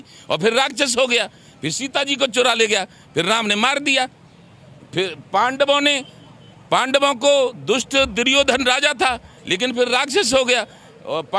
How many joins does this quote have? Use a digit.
0